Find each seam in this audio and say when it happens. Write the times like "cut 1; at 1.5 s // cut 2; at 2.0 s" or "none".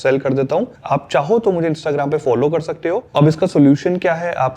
cut 1; at 3.0 s